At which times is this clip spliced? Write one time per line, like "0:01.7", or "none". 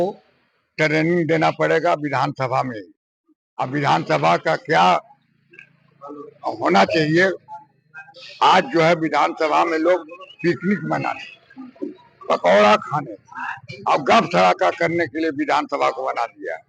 none